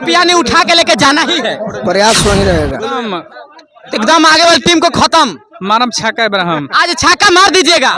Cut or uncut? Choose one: cut